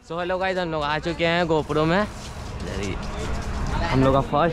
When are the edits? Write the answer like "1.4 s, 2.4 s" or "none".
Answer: none